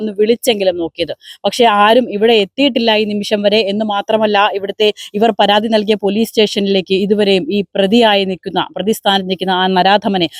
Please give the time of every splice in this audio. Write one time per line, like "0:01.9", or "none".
none